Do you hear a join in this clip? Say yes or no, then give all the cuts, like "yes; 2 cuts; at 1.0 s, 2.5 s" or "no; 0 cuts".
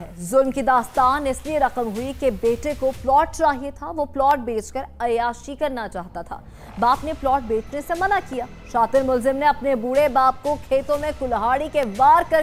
no; 0 cuts